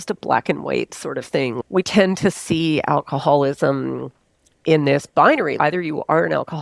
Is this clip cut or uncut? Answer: cut